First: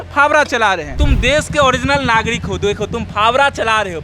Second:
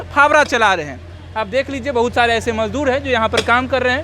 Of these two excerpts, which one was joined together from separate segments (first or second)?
first